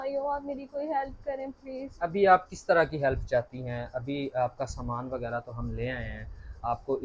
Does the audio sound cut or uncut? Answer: uncut